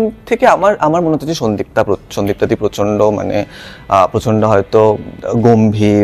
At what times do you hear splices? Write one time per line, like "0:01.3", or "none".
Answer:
none